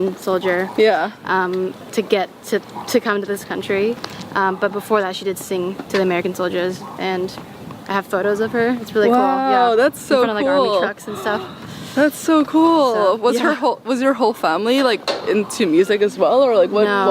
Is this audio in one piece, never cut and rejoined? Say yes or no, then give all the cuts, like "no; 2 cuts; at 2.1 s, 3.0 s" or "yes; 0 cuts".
yes; 0 cuts